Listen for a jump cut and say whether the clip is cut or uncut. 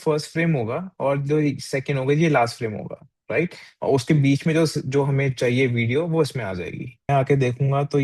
cut